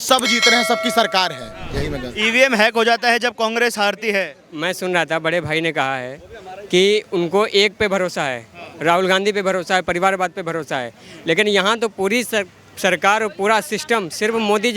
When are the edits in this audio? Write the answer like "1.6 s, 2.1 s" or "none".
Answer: none